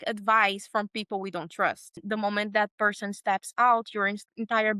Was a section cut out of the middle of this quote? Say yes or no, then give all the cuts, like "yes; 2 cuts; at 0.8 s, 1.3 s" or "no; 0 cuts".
yes; 1 cut; at 2.0 s